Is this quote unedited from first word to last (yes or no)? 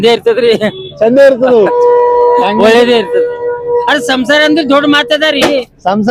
yes